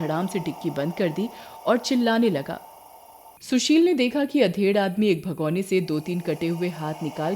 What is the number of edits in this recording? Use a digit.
1